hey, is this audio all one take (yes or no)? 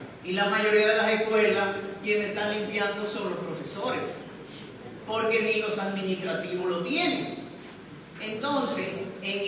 yes